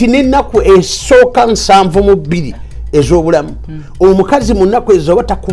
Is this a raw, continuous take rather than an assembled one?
yes; 0 cuts

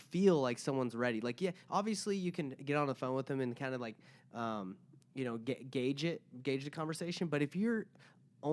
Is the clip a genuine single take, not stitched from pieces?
yes; 0 cuts

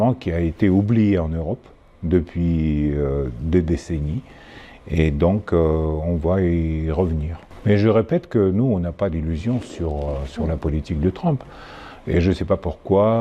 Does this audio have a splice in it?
yes; 1 cut; at 7.4 s

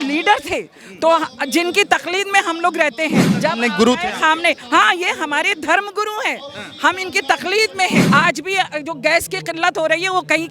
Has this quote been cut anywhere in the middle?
yes; 2 cuts; at 3.3 s, 8.0 s

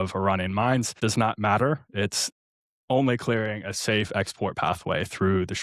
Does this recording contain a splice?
yes; 1 cut; at 1.0 s

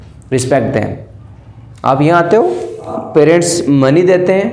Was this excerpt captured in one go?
no; 1 cut; at 3.0 s

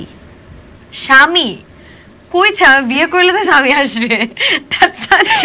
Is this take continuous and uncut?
yes; 0 cuts

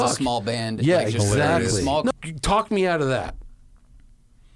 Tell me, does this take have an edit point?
yes; 1 cut; at 2.1 s

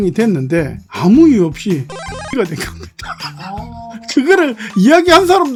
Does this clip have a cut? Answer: no; 0 cuts

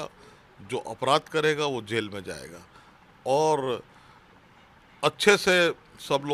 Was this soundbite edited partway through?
no; 0 cuts

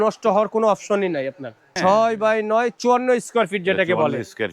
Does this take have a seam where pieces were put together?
yes; 1 cut; at 1.6 s

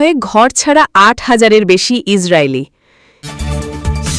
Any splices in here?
yes; 1 cut; at 3.0 s

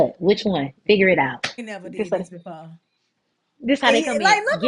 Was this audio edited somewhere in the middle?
yes; 1 cut; at 1.6 s

